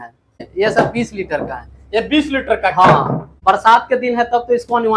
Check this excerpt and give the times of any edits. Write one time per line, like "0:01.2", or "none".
0:03.3